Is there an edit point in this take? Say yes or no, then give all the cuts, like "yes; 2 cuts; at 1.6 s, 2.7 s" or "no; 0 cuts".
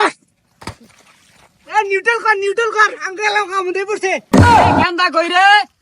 yes; 2 cuts; at 4.2 s, 4.9 s